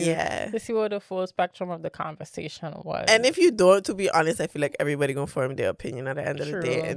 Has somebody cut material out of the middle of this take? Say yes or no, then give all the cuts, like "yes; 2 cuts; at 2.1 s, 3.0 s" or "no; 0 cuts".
no; 0 cuts